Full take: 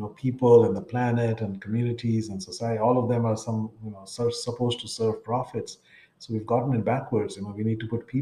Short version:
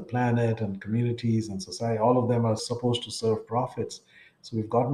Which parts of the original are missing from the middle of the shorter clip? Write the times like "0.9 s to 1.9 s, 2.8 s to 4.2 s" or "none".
3.4 s to 4.4 s